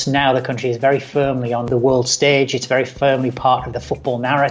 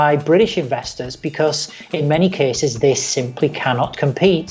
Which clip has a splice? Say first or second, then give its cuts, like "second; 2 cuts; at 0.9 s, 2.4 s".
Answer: first; 2 cuts; at 1.7 s, 3.7 s